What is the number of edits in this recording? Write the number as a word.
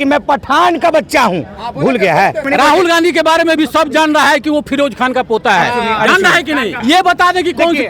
two